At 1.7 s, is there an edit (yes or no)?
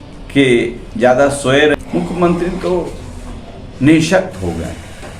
yes